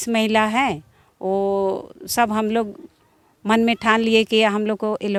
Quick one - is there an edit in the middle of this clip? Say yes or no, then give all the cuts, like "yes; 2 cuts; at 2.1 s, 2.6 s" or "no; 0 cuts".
no; 0 cuts